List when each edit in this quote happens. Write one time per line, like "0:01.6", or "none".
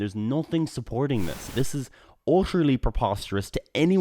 0:01.4